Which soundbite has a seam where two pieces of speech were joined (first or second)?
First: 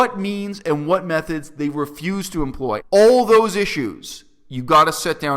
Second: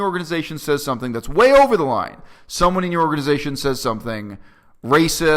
first